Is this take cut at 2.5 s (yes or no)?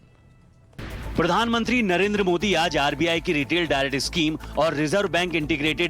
yes